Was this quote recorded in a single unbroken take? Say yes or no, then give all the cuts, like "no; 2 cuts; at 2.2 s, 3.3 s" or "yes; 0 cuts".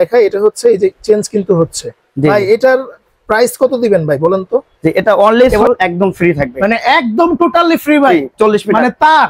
no; 1 cut; at 5.5 s